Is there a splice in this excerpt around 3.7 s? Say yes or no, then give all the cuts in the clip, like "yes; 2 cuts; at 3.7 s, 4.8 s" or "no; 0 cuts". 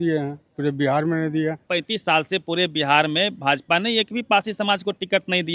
no; 1 cut; at 1.6 s